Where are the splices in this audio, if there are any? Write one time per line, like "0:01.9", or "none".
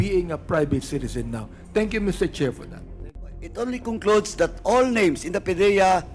0:03.2